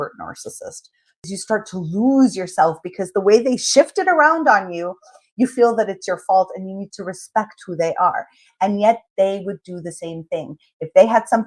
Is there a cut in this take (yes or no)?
yes